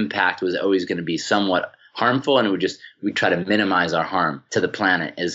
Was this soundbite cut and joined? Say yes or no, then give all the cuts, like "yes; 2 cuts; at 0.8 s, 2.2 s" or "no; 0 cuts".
yes; 2 cuts; at 2.9 s, 4.4 s